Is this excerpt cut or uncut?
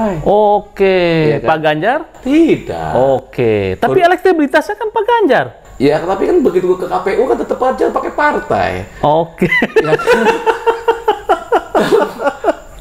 uncut